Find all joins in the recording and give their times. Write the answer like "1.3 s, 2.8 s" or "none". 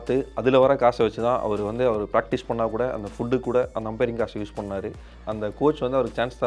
5.2 s